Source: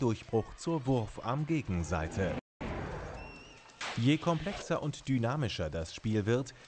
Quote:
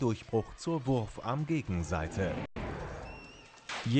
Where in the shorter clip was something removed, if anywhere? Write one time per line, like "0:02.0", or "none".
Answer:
0:02.7